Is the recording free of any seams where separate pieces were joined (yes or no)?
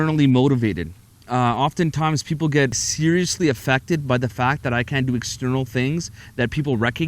no